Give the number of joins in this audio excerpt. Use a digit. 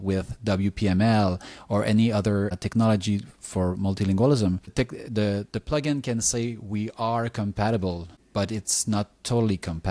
1